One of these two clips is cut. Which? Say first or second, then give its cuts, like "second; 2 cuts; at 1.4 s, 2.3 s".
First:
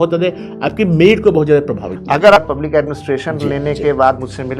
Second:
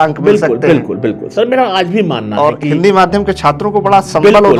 first; 1 cut; at 2.4 s